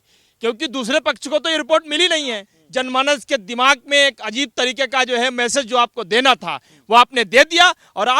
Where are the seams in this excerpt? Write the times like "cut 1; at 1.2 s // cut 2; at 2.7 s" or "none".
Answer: cut 1; at 2.5 s